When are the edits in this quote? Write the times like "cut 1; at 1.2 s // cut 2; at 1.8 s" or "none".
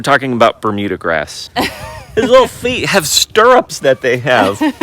cut 1; at 1.4 s